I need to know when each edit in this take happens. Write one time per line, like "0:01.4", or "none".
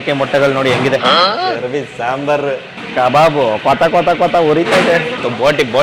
0:02.8